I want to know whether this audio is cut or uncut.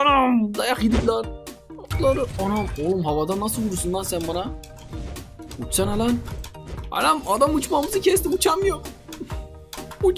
cut